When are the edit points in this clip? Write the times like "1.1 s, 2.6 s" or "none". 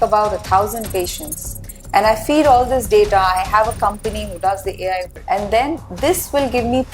5.1 s